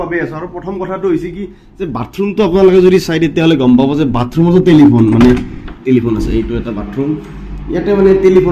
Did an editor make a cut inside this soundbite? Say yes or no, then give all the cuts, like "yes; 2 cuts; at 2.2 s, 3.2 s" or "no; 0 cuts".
no; 0 cuts